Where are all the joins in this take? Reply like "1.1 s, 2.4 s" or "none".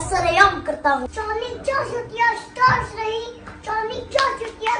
1.1 s